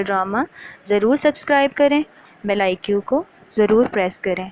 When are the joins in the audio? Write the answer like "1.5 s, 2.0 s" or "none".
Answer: 2.2 s